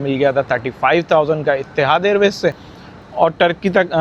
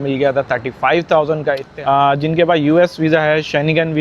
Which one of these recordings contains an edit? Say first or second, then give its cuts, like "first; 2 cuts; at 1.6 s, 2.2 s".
second; 1 cut; at 1.7 s